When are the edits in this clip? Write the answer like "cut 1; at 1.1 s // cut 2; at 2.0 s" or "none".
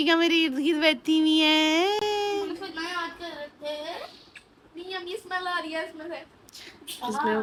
none